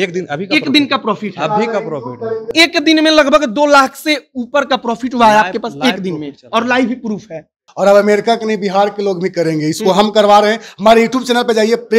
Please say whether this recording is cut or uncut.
cut